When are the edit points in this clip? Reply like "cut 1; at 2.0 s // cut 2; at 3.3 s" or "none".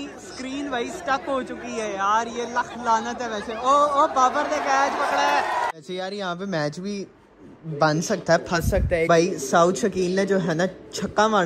cut 1; at 5.8 s // cut 2; at 9.1 s